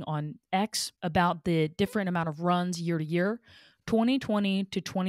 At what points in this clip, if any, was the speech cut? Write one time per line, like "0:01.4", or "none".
none